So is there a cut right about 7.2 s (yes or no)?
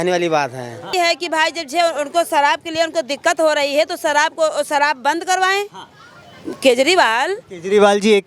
no